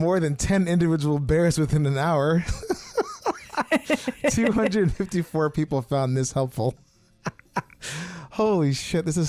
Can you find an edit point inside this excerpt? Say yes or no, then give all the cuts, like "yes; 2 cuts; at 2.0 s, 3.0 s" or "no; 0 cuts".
no; 0 cuts